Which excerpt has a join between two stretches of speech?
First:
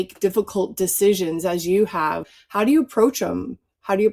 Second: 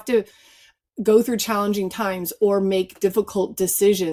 first; 1 cut; at 2.3 s

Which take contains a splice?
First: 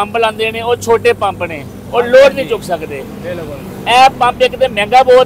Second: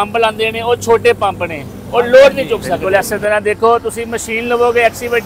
second; 1 cut; at 2.8 s

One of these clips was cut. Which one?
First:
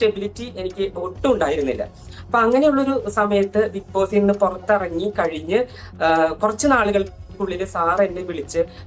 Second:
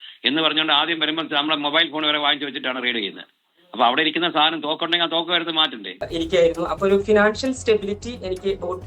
second; 1 cut; at 6.0 s

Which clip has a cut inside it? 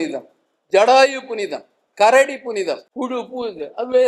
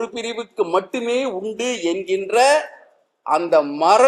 first; 1 cut; at 2.9 s

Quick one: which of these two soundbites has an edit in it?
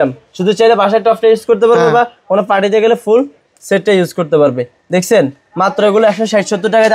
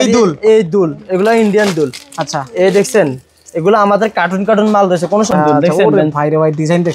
second; 1 cut; at 5.3 s

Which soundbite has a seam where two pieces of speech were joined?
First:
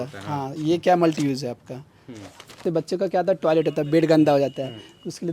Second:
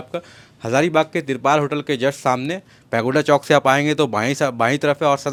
first; 1 cut; at 2.6 s

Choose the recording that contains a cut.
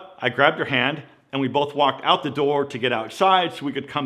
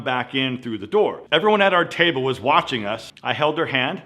second; 2 cuts; at 1.2 s, 3.0 s

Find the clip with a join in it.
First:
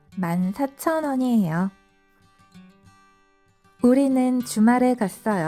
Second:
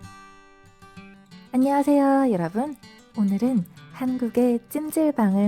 second; 1 cut; at 1.0 s

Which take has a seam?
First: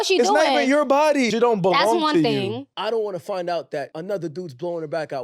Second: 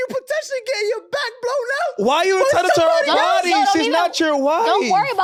first; 3 cuts; at 1.3 s, 2.7 s, 3.9 s

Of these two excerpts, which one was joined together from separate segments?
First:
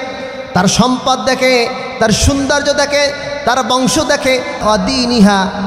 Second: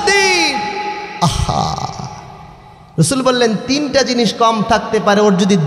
first; 1 cut; at 4.6 s

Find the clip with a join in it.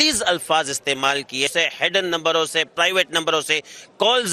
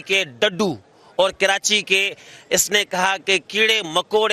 first; 1 cut; at 1.5 s

